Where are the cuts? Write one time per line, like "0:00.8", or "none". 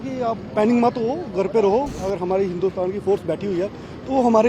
0:01.9